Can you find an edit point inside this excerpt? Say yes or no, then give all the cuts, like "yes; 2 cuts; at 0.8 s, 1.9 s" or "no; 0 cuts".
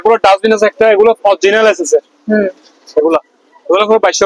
no; 0 cuts